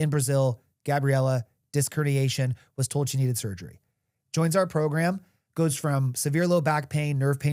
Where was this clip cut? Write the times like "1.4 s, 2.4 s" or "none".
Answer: none